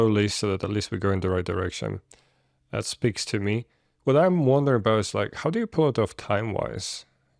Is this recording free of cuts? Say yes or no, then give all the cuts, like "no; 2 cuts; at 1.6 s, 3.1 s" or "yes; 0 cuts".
yes; 0 cuts